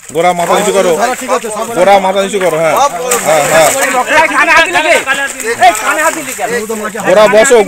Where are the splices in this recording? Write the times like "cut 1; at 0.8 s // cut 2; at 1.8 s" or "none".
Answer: none